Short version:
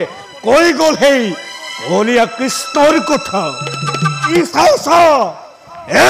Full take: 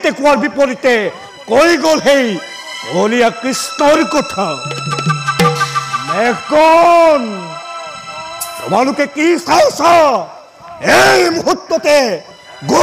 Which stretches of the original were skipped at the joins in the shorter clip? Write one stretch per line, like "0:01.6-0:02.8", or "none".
0:05.3-0:09.2